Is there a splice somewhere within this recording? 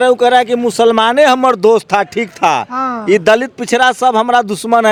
no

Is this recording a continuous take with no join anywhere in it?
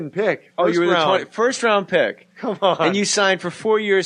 yes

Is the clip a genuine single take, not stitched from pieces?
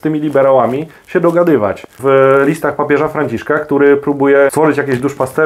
no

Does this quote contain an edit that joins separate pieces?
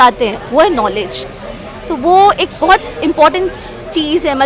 no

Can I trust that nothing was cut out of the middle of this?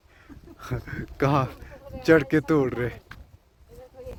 yes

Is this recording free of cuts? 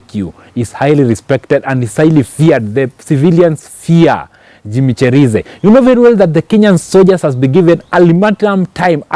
yes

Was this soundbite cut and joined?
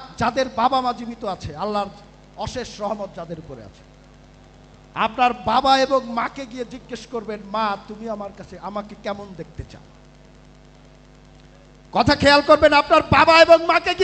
no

